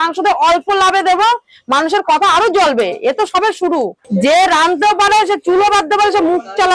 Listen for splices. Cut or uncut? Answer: cut